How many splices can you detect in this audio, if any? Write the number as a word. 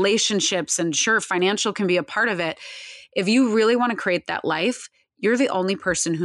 zero